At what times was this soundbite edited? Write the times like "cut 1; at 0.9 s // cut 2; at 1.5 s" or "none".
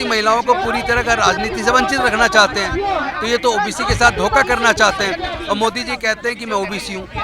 none